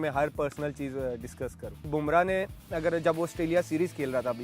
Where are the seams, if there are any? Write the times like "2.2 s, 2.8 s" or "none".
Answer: 1.9 s